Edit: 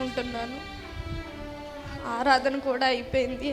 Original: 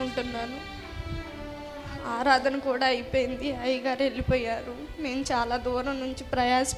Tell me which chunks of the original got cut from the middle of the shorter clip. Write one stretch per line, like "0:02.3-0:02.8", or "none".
none